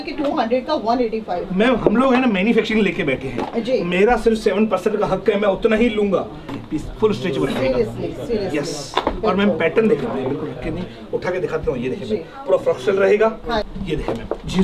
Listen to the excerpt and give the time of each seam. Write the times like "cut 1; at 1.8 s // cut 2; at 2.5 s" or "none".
cut 1; at 6.5 s // cut 2; at 13.7 s